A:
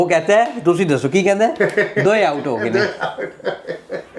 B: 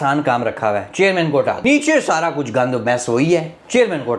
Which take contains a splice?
B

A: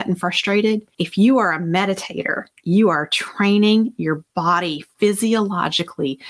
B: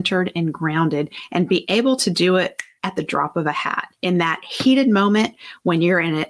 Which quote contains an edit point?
B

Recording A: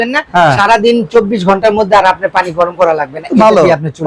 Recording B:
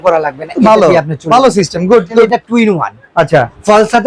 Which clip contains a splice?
B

